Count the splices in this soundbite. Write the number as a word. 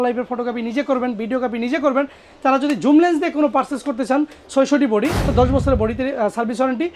one